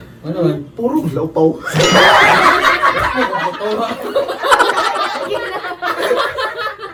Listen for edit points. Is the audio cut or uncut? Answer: uncut